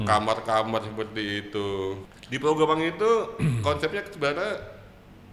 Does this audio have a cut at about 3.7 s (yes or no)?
no